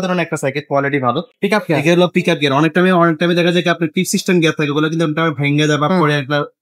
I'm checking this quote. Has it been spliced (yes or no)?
yes